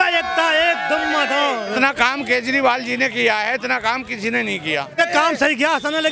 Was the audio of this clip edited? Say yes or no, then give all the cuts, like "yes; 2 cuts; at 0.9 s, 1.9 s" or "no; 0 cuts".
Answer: yes; 2 cuts; at 1.8 s, 4.9 s